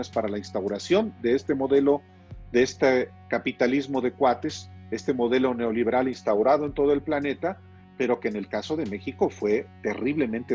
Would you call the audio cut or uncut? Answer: uncut